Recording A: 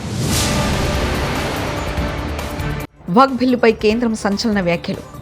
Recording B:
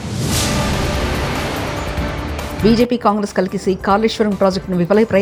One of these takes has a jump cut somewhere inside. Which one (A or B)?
A